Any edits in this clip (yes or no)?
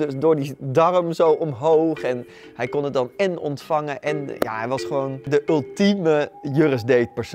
yes